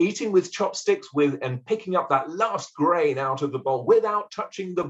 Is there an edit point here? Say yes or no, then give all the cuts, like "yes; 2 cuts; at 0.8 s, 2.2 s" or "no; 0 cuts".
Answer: no; 0 cuts